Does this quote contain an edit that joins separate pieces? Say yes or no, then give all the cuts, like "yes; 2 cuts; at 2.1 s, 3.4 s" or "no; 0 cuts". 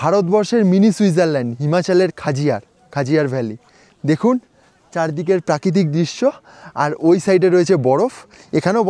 no; 0 cuts